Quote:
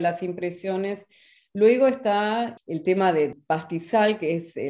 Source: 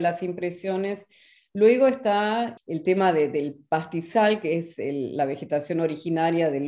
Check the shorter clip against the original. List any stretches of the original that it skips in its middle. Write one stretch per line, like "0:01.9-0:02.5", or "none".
0:03.3-0:03.5